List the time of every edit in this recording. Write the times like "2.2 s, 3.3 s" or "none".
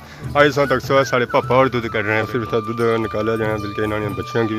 2.3 s